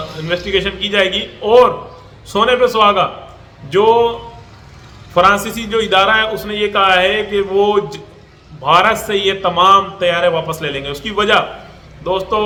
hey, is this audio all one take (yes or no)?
yes